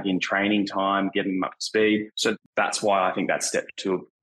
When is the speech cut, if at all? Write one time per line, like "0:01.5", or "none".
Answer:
0:02.4